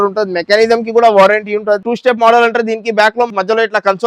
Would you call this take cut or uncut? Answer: cut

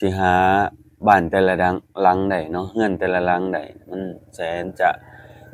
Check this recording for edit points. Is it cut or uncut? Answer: uncut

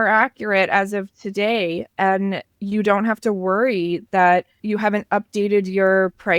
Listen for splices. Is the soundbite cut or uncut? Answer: cut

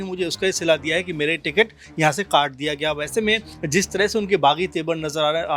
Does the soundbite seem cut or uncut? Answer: uncut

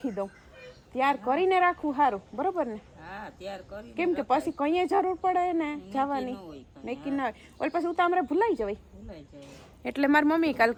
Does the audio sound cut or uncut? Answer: uncut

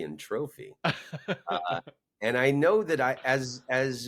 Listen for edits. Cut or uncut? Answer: uncut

